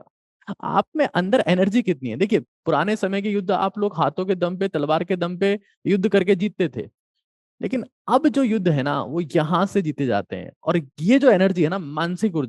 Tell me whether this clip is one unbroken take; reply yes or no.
yes